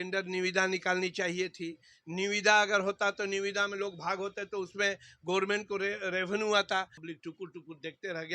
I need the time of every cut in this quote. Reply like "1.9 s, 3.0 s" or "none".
7.0 s